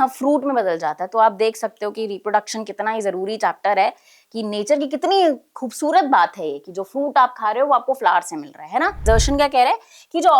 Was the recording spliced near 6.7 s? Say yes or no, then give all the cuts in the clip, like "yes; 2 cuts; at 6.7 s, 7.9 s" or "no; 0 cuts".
no; 1 cut; at 9.0 s